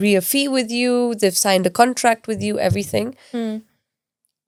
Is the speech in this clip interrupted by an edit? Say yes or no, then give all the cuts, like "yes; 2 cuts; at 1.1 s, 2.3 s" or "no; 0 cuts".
no; 0 cuts